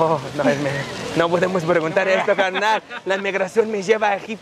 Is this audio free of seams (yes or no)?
yes